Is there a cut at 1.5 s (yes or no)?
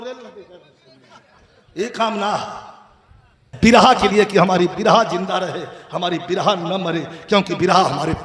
no